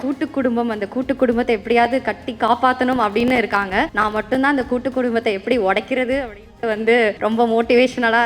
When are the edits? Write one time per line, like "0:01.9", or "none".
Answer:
0:03.9
0:07.2